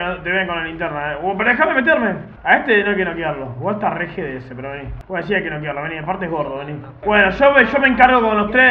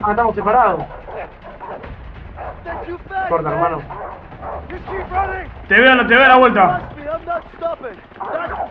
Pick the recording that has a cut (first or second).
first